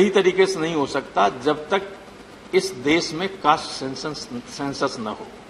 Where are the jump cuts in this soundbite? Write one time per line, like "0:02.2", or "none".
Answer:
none